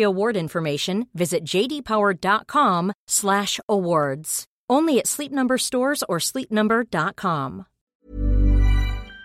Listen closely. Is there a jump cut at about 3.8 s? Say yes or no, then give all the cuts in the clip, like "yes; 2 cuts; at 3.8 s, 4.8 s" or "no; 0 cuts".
no; 1 cut; at 8.0 s